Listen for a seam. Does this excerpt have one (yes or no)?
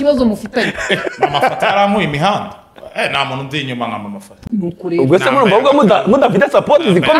no